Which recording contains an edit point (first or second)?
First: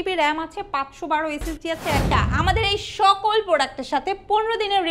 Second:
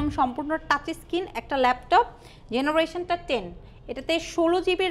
first